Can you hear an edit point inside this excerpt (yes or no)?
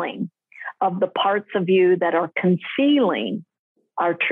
no